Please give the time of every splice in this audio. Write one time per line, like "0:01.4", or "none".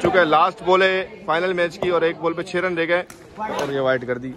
none